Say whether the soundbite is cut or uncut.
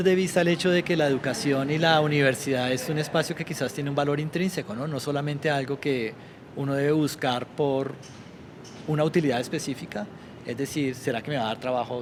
uncut